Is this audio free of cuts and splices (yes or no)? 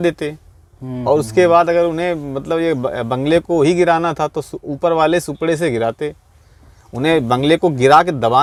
yes